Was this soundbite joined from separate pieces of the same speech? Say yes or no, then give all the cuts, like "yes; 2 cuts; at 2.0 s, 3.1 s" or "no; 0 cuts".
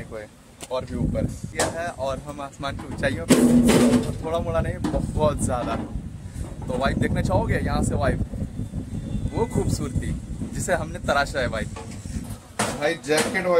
yes; 2 cuts; at 1.5 s, 12.3 s